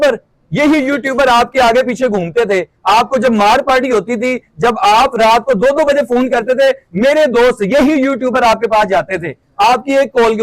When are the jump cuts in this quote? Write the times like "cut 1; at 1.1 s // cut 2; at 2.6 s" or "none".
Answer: none